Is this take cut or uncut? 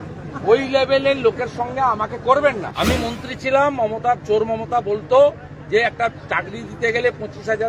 cut